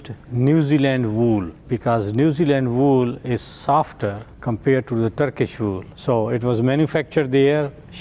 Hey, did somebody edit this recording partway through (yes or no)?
no